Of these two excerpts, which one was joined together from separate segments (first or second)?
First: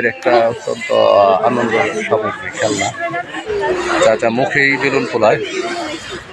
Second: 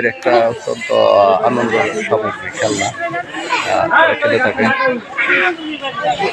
first